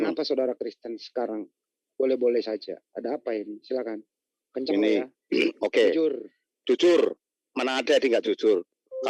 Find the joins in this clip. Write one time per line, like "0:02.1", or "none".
none